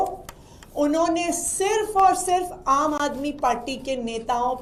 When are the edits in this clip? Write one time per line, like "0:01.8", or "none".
none